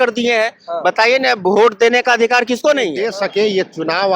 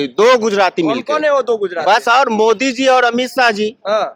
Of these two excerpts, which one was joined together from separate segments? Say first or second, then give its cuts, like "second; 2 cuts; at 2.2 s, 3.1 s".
first; 1 cut; at 3.0 s